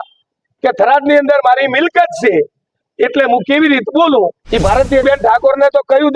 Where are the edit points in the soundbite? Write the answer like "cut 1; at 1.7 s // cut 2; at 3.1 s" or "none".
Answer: cut 1; at 5.0 s